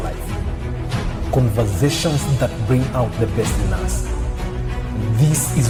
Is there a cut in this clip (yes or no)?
no